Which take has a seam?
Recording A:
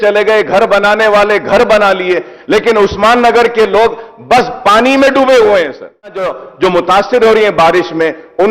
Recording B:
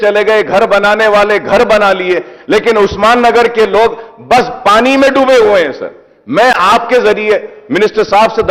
A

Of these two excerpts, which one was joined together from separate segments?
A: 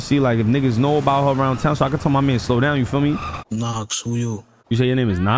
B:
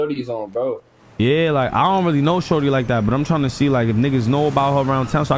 A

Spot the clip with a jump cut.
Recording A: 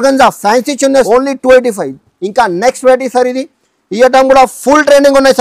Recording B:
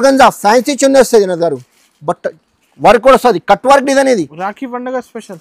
A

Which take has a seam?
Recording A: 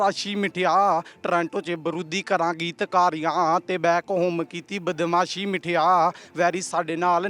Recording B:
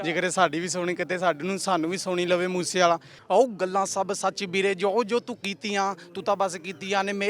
B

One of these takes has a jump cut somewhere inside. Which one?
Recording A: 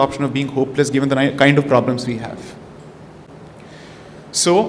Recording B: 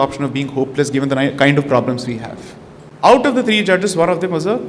B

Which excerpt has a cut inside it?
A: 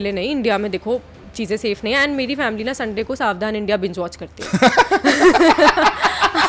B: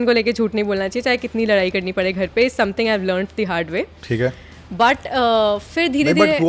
A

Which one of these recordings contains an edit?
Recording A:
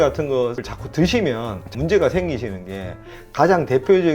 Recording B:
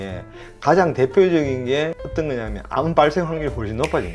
A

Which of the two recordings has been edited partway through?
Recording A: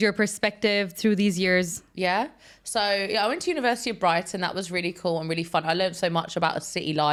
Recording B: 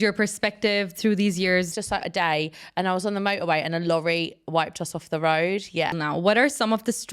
B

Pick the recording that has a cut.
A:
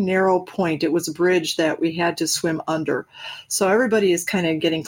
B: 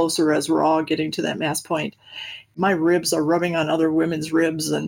B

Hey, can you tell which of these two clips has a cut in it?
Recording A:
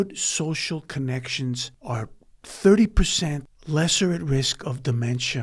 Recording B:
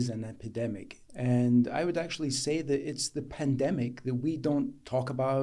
A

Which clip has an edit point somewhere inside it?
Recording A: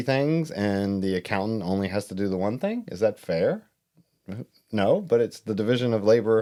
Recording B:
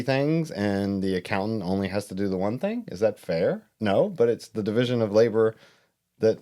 B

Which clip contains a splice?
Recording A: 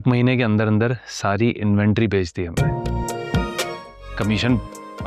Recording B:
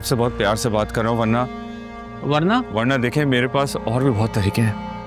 A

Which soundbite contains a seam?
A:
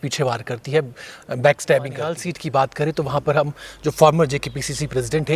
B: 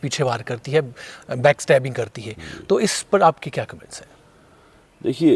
A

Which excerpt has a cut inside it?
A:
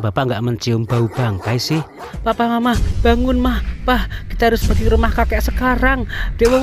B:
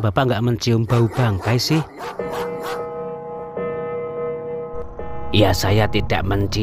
A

